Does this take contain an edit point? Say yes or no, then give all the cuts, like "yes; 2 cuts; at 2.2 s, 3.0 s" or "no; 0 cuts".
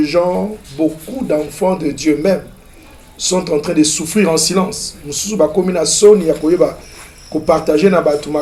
no; 0 cuts